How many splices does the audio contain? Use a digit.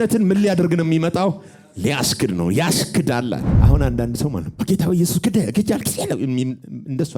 1